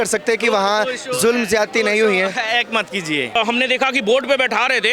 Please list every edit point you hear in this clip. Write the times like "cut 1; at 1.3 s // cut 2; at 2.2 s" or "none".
cut 1; at 3.3 s